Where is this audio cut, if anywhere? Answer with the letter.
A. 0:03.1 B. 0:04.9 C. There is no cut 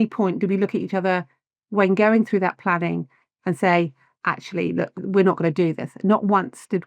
B